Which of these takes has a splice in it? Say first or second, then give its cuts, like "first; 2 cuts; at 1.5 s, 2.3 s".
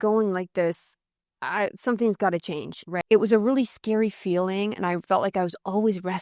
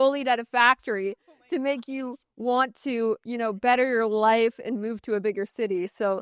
first; 1 cut; at 2.9 s